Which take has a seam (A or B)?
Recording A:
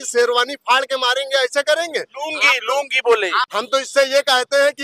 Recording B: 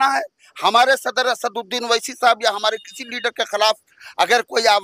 A